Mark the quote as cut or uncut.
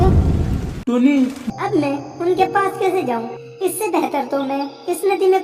cut